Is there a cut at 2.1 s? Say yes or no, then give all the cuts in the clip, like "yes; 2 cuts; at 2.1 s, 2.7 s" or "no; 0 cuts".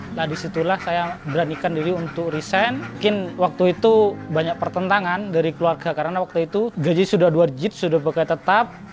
no; 0 cuts